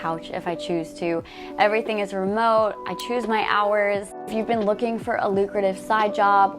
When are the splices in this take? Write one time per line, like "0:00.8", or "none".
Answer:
0:04.3